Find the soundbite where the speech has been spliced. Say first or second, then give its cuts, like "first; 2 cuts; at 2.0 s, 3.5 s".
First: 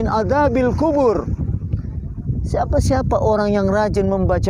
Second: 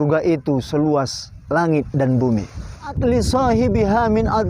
second; 1 cut; at 3.0 s